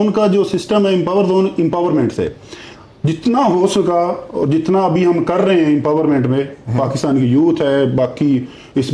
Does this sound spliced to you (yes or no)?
no